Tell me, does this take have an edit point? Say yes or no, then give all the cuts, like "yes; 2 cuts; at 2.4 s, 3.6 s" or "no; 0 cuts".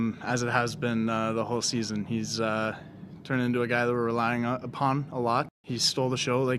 yes; 1 cut; at 5.6 s